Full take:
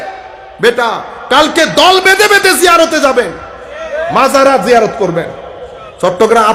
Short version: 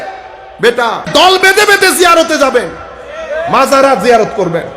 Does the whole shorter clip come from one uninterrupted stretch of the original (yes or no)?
no